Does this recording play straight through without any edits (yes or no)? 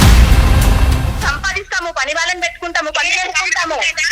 no